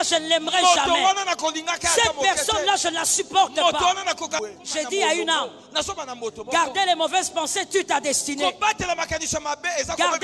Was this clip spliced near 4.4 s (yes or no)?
yes